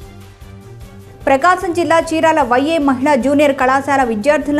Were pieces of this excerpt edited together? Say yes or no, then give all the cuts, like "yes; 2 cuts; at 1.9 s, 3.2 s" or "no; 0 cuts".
no; 0 cuts